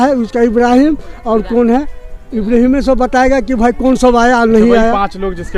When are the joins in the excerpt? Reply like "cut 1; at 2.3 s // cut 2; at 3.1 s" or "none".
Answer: none